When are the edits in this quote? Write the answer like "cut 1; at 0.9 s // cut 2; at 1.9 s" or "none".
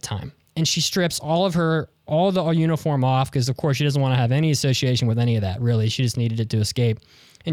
none